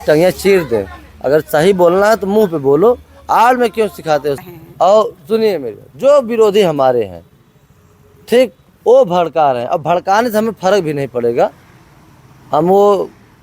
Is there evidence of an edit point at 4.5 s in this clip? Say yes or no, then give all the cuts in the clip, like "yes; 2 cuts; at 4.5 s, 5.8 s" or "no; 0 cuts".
yes; 1 cut; at 4.5 s